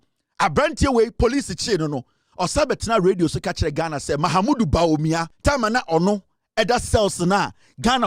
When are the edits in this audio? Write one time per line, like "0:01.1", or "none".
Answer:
0:05.3